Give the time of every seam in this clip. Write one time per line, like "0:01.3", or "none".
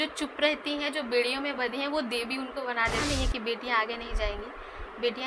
0:03.0